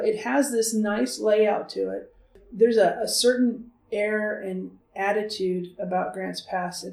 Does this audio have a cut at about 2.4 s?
yes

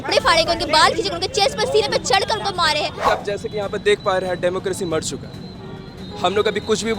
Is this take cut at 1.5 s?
no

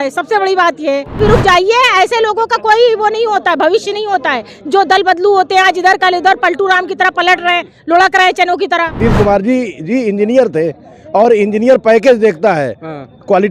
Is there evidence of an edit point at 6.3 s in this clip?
no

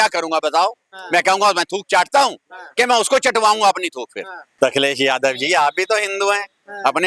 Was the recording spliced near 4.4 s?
yes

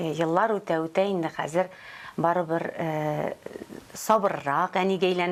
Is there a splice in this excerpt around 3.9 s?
no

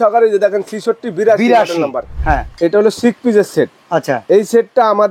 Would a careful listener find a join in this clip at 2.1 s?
yes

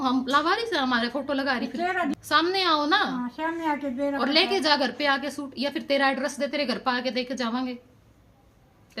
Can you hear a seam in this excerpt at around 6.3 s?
no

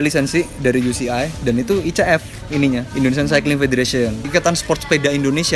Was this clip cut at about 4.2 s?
yes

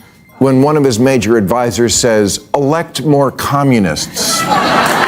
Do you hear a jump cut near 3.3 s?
no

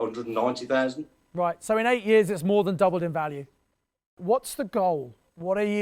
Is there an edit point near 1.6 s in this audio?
no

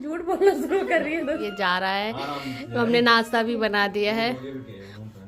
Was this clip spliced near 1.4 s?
yes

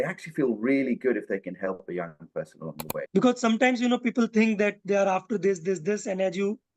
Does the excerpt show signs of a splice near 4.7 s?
no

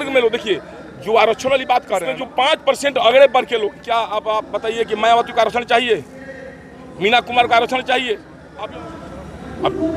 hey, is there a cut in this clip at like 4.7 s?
no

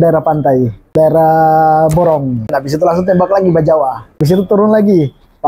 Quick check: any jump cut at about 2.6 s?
yes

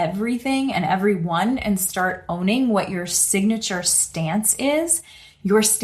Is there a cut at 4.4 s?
no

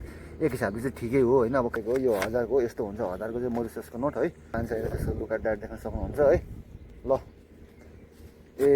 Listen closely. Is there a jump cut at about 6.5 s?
no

